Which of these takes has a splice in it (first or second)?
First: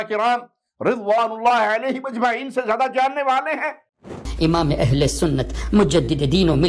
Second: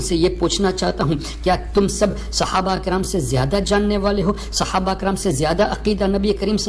first